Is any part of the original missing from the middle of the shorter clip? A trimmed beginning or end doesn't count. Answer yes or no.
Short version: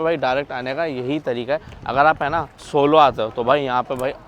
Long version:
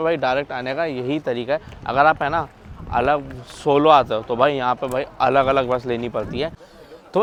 yes